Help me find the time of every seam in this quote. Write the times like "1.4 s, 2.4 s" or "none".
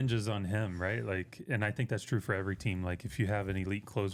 none